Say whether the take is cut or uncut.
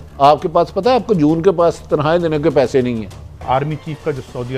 cut